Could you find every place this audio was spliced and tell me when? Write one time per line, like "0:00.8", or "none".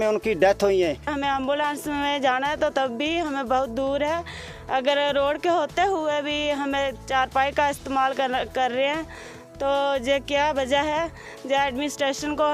0:01.2